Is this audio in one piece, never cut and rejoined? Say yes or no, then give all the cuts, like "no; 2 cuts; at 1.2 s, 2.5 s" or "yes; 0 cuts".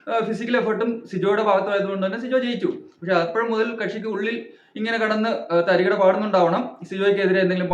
yes; 0 cuts